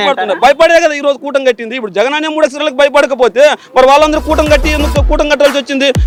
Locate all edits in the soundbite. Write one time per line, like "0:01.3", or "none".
none